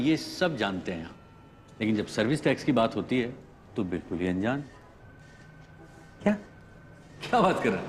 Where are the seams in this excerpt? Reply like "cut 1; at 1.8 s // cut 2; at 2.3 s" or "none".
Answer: none